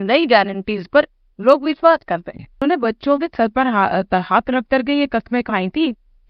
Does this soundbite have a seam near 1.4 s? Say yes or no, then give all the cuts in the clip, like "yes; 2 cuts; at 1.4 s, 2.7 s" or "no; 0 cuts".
no; 1 cut; at 2.6 s